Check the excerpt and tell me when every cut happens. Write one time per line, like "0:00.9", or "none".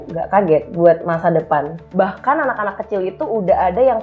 0:01.9